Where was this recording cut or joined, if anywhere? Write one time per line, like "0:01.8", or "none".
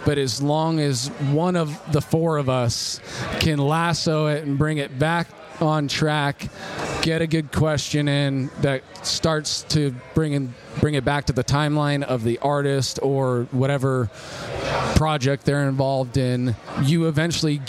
none